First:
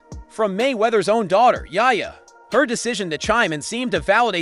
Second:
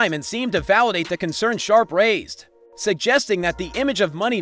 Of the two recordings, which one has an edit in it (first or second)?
second